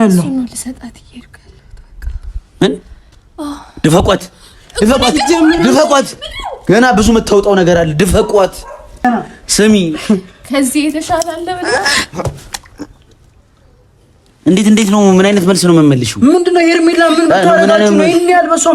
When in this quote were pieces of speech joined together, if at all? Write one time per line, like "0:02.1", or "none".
0:09.0